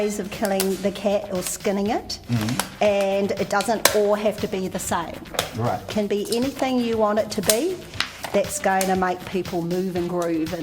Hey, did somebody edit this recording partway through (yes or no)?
yes